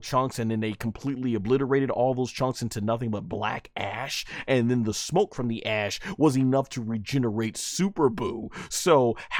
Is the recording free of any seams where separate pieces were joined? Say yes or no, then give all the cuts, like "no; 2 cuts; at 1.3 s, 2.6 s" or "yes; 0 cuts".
yes; 0 cuts